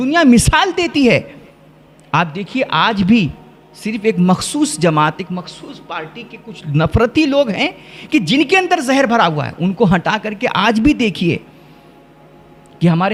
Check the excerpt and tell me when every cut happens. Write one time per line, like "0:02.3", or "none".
none